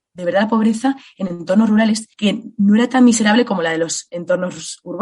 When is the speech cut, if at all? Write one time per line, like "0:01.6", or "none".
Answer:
0:02.1

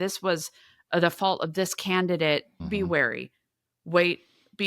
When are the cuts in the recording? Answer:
0:02.6

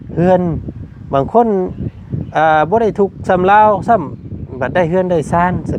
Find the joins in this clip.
none

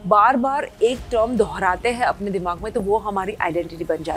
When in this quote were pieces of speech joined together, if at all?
none

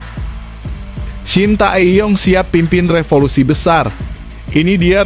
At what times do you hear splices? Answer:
0:01.3

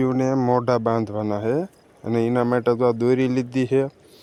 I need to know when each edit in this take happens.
none

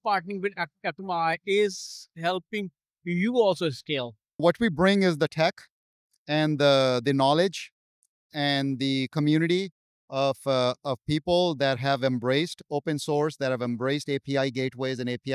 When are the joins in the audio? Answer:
0:04.4

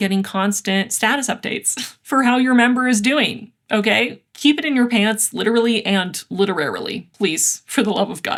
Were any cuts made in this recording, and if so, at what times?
none

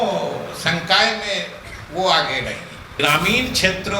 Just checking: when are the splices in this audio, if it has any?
0:02.8

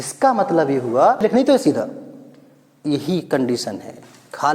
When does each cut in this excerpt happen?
0:01.2

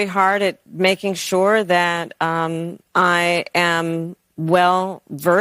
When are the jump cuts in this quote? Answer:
none

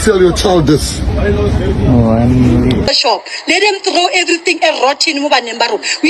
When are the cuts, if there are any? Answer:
0:02.9

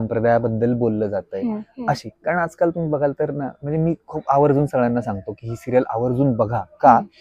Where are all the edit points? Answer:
none

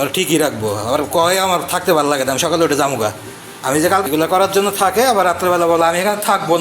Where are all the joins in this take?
0:04.0

